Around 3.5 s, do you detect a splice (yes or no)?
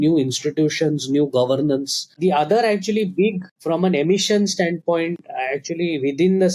yes